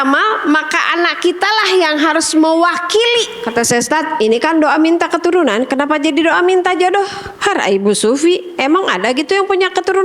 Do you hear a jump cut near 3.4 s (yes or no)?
yes